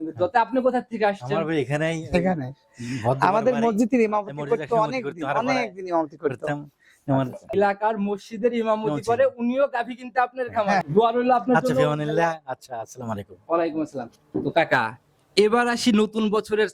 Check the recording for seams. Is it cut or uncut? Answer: uncut